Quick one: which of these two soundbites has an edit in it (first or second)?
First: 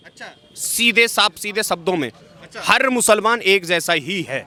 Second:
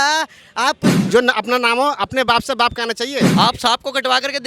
second